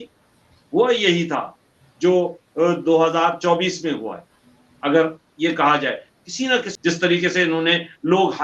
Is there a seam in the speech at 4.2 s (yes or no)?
no